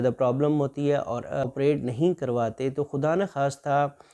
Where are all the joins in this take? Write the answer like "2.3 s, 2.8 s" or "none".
1.4 s